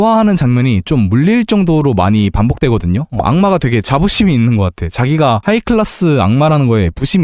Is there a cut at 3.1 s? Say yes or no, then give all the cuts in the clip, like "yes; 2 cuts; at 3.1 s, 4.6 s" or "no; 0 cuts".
yes; 1 cut; at 3.1 s